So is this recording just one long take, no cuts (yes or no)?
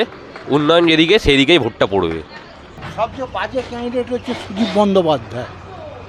yes